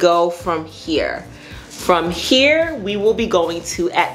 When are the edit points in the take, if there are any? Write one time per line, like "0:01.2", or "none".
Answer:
none